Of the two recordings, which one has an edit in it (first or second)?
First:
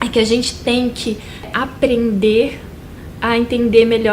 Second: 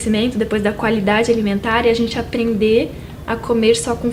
first